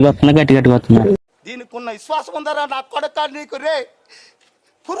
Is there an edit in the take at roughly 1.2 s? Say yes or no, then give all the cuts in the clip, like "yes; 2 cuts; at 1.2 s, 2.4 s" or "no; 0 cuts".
yes; 1 cut; at 1.2 s